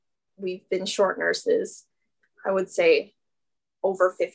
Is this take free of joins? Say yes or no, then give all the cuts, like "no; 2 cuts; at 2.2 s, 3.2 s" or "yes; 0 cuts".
yes; 0 cuts